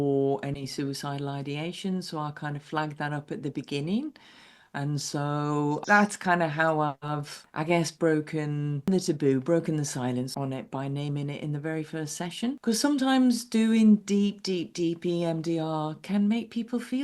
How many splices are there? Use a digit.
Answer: 3